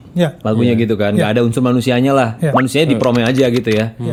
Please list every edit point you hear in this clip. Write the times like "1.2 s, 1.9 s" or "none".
none